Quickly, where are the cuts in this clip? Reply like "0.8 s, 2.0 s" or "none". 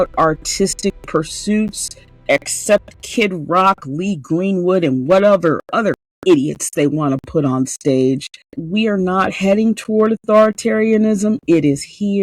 8.6 s